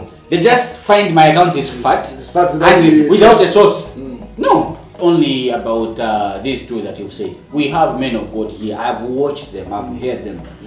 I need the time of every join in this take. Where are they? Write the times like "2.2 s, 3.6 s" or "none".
4.9 s